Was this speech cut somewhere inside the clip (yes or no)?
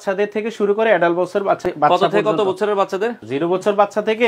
yes